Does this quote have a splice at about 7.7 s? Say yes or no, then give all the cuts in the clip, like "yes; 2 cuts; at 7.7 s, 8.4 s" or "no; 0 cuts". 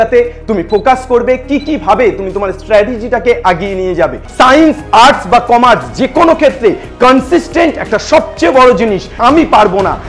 no; 2 cuts; at 4.2 s, 9.1 s